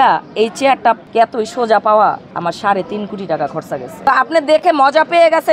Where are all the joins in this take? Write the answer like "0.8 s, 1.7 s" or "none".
1.0 s, 2.3 s, 4.1 s